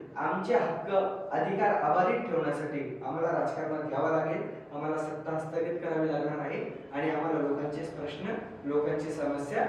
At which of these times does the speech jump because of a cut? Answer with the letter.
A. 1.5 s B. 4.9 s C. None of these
C